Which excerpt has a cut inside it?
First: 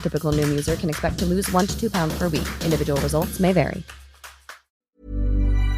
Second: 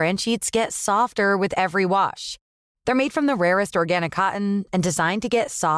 first; 1 cut; at 4.6 s

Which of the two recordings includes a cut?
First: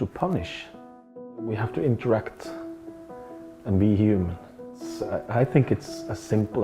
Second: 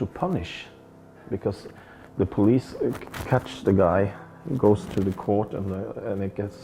first; 2 cuts; at 1.1 s, 4.9 s

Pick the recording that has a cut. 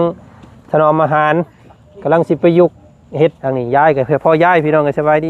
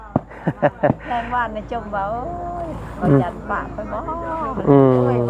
first; 1 cut; at 3.5 s

